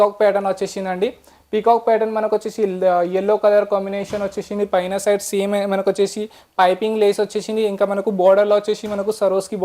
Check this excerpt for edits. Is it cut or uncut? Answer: uncut